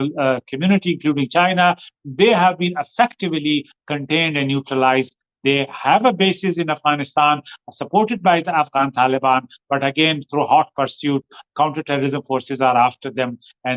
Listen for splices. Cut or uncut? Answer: uncut